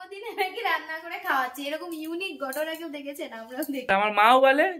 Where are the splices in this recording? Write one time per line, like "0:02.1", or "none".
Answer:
0:03.9